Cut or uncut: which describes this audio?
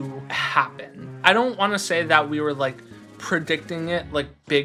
uncut